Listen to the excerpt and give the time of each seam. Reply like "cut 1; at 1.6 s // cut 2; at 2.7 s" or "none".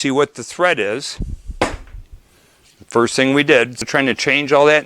cut 1; at 3.8 s